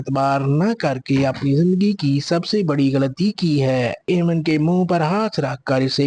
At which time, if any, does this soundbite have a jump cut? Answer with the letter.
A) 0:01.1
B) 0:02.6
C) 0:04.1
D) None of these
C